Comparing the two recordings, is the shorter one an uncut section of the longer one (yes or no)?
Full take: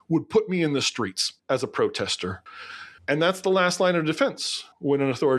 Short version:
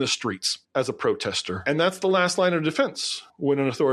no